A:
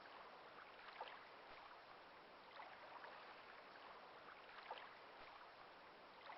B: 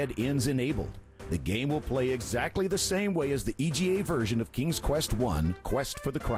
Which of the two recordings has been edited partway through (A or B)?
A